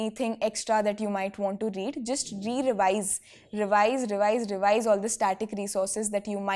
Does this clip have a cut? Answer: no; 0 cuts

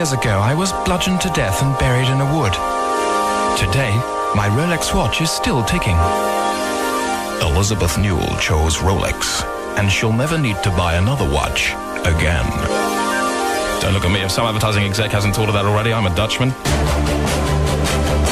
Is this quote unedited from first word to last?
no; 1 cut; at 2.8 s

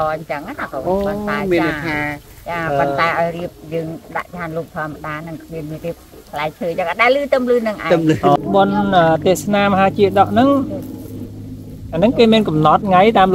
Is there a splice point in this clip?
yes; 1 cut; at 7.9 s

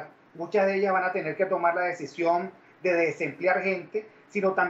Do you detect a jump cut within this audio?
yes; 1 cut; at 2.6 s

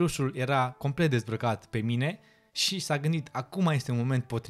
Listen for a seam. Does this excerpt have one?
no; 0 cuts

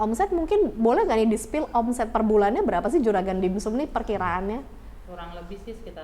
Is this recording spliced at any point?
no; 0 cuts

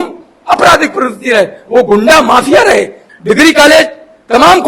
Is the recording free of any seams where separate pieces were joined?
no; 1 cut; at 3.0 s

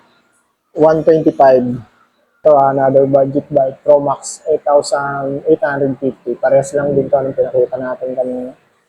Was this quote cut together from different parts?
yes; 1 cut; at 2.4 s

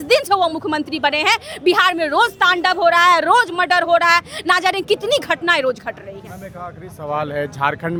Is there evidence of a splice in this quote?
no; 0 cuts

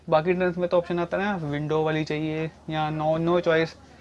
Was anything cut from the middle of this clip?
no; 0 cuts

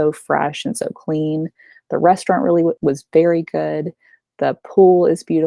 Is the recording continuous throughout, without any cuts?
no; 1 cut; at 2.8 s

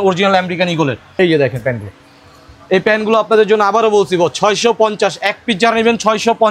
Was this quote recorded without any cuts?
no; 1 cut; at 1.1 s

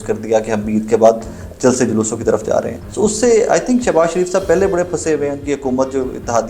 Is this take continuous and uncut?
no; 1 cut; at 2.8 s

